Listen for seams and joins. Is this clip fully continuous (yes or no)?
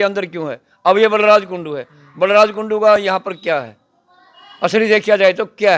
yes